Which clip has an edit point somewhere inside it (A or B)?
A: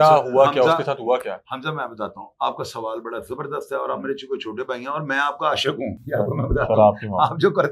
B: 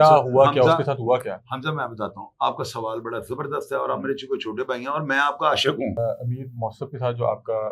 B